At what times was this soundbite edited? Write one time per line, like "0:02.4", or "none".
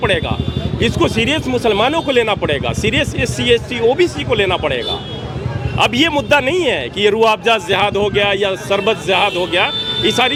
none